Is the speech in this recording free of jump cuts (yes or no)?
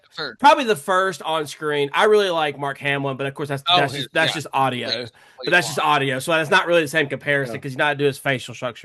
yes